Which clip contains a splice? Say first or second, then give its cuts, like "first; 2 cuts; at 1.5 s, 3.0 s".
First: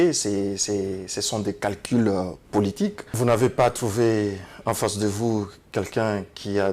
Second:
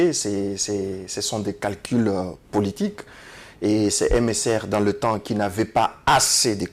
first; 1 cut; at 3.0 s